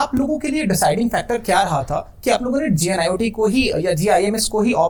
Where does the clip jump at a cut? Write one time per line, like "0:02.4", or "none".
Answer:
none